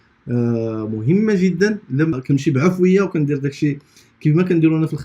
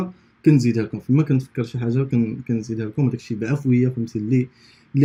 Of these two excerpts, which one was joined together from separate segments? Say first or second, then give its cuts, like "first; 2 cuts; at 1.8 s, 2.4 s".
first; 1 cut; at 2.2 s